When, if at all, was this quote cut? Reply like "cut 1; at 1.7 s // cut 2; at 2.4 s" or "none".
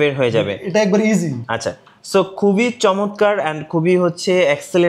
none